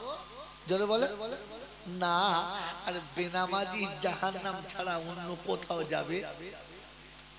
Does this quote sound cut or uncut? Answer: uncut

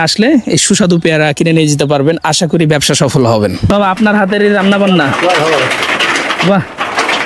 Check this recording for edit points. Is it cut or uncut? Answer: cut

